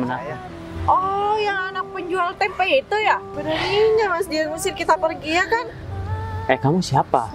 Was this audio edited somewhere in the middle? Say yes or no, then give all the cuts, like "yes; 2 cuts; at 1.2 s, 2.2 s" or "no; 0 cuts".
yes; 1 cut; at 3.3 s